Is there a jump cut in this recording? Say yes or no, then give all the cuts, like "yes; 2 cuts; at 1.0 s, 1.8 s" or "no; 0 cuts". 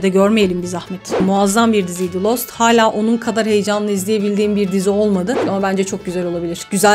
yes; 2 cuts; at 1.2 s, 5.4 s